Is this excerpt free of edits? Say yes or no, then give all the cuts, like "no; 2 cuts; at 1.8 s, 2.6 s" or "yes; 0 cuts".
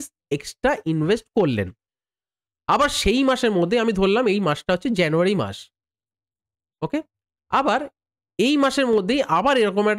yes; 0 cuts